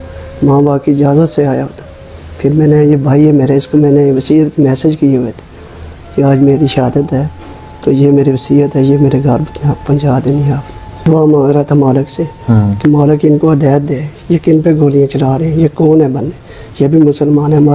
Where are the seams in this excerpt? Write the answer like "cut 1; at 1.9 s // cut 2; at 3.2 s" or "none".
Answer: cut 1; at 11.0 s